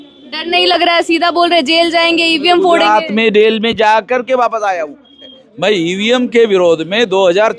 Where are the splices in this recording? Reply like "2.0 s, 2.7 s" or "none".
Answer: 5.4 s